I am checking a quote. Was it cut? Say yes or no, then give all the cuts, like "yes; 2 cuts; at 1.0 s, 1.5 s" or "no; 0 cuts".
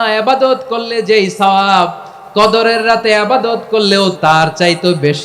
yes; 1 cut; at 4.2 s